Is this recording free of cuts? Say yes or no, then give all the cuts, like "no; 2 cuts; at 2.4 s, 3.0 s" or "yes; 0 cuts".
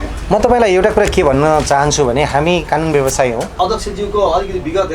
no; 1 cut; at 3.6 s